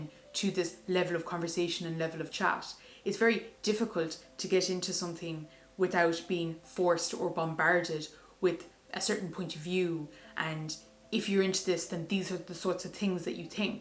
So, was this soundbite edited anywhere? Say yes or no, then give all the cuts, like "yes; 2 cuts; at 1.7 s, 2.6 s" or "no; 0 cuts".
no; 0 cuts